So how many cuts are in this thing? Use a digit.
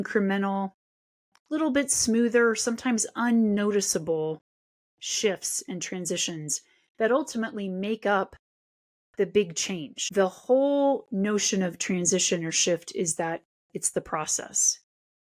1